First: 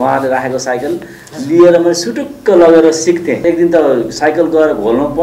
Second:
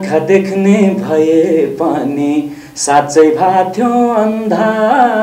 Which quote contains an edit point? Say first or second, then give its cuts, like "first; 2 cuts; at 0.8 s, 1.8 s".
first; 1 cut; at 3.4 s